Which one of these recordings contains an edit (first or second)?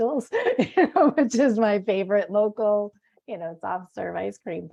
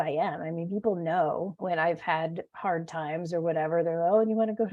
second